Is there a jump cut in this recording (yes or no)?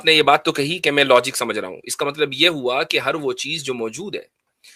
no